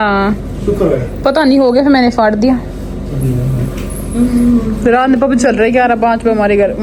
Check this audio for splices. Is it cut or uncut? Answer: uncut